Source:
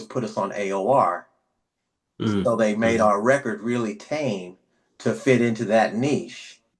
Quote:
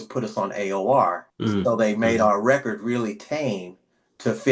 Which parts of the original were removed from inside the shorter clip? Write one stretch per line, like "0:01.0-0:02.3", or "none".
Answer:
0:01.3-0:02.1